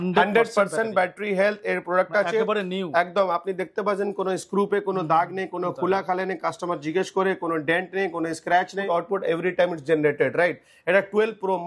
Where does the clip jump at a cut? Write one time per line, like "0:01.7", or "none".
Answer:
0:08.8